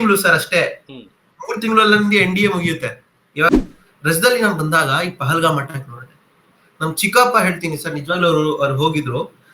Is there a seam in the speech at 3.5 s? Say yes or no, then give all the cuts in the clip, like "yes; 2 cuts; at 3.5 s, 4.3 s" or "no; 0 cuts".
yes; 1 cut; at 3.5 s